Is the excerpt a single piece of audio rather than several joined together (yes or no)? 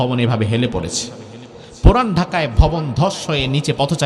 yes